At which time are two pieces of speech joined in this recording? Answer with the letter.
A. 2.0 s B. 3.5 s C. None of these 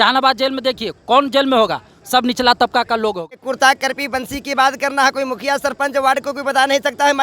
B